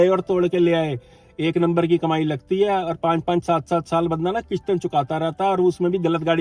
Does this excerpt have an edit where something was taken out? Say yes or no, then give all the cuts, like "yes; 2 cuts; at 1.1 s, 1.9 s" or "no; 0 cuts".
no; 0 cuts